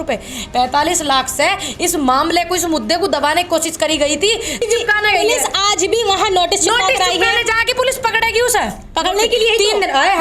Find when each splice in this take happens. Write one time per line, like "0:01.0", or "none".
0:04.6